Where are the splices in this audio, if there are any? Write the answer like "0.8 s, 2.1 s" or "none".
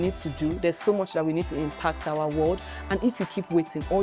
none